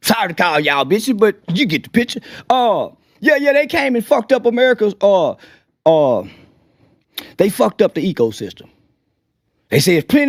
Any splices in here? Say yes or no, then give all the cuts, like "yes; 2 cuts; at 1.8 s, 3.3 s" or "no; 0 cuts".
no; 0 cuts